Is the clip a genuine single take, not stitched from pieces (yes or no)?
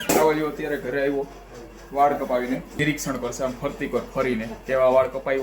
no